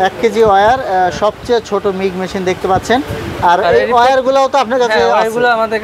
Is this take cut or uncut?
uncut